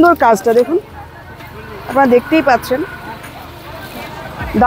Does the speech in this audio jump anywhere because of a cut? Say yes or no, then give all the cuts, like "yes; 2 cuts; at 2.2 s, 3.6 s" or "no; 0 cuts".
no; 0 cuts